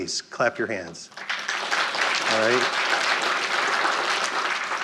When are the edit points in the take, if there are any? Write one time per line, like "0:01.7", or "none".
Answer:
none